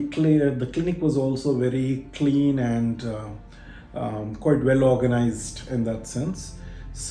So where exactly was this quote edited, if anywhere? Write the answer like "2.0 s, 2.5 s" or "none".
none